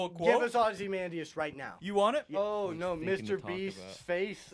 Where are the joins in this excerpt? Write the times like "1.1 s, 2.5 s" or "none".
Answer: 2.4 s